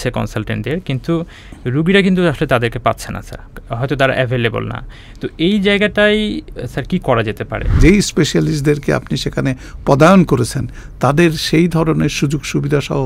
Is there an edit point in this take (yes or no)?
yes